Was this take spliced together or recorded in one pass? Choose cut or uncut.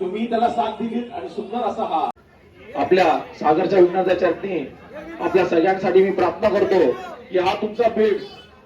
cut